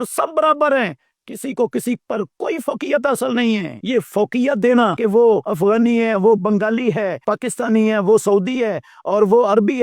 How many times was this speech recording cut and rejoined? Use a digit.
3